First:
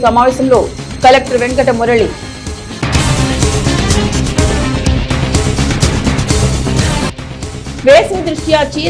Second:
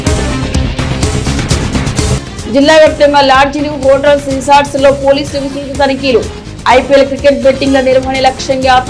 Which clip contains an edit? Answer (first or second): second